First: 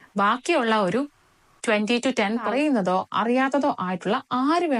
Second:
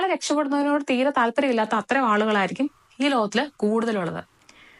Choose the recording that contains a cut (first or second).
first